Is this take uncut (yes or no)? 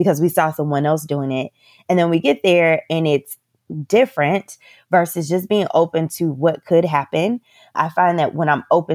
no